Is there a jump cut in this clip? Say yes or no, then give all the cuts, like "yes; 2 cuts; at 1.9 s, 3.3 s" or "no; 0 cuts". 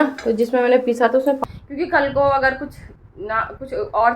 yes; 1 cut; at 1.4 s